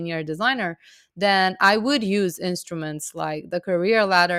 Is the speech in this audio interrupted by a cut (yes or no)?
no